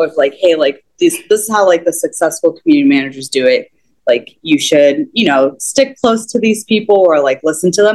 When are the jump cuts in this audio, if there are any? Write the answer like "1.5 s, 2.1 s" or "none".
none